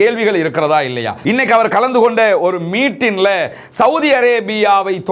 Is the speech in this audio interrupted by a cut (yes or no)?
yes